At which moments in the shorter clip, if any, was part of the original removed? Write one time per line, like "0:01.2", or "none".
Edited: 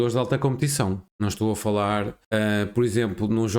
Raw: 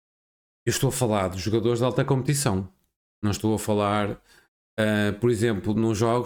0:01.1
0:02.2